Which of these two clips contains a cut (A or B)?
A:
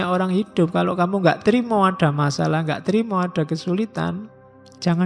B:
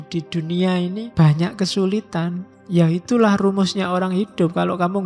B